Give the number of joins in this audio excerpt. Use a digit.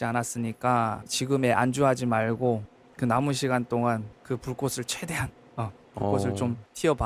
0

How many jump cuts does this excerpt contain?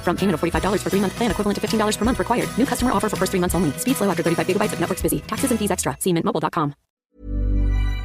1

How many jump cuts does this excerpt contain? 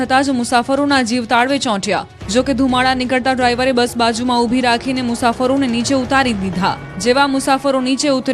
1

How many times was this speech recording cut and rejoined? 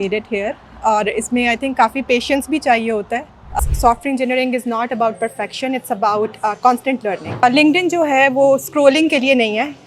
2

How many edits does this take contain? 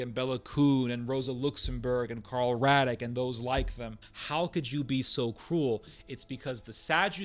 1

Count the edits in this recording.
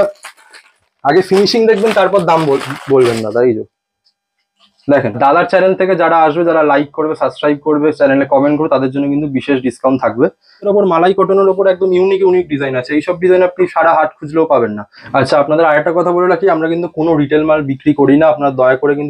3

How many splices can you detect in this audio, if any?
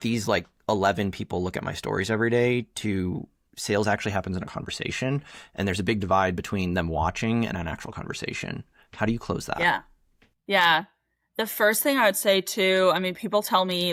0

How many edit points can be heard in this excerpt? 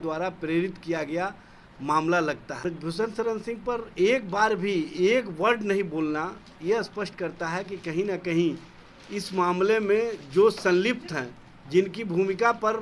1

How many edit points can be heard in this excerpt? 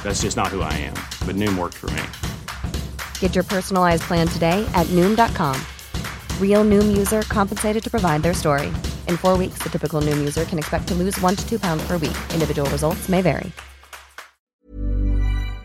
1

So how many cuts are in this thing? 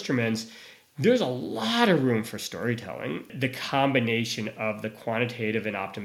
1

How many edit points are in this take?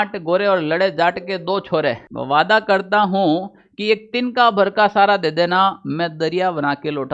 1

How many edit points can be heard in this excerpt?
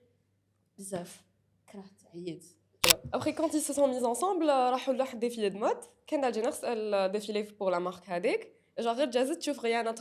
1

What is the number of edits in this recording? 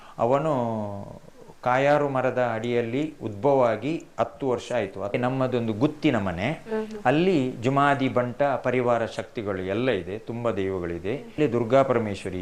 2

